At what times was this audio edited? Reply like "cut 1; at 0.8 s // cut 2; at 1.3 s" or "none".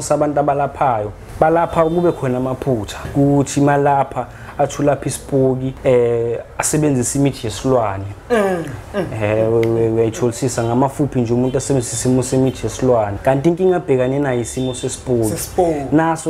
cut 1; at 1.2 s // cut 2; at 3.1 s // cut 3; at 5.7 s // cut 4; at 13.1 s

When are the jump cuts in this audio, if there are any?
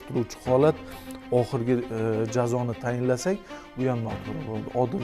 none

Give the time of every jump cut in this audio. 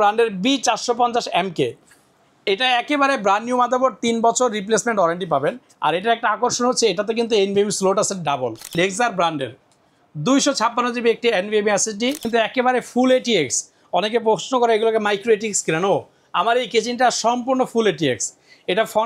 cut 1; at 8.7 s // cut 2; at 12.2 s

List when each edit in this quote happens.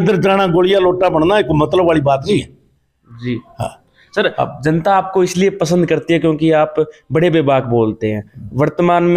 none

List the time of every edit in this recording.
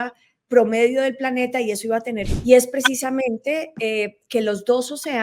cut 1; at 2.3 s

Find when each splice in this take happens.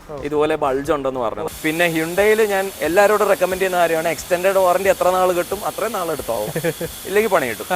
cut 1; at 1.4 s

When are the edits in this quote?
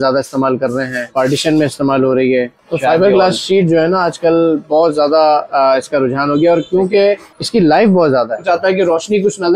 cut 1; at 1.1 s // cut 2; at 2.6 s // cut 3; at 7.3 s // cut 4; at 8.4 s

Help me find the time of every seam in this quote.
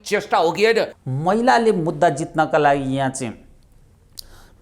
cut 1; at 1.0 s

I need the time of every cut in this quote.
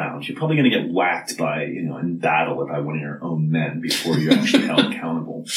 none

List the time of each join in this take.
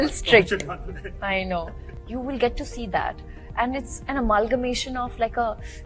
cut 1; at 1.9 s

